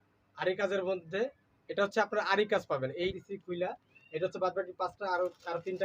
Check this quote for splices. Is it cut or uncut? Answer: cut